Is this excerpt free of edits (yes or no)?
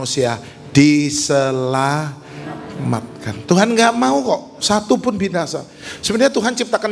yes